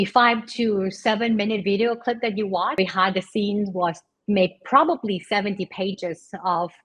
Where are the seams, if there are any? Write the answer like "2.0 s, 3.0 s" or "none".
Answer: 2.7 s